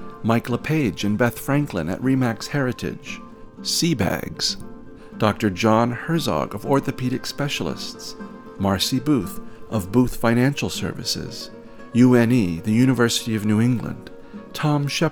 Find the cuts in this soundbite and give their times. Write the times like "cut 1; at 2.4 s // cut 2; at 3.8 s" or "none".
none